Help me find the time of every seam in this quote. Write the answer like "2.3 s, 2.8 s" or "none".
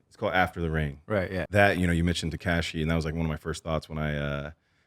1.4 s